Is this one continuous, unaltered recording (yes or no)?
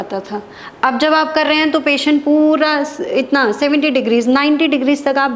yes